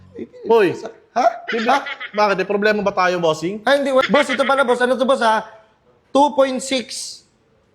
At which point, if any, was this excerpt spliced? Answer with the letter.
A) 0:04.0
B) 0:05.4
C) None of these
A